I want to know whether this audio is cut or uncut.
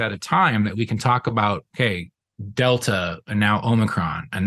uncut